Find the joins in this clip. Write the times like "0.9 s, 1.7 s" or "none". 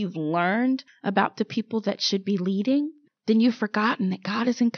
0.9 s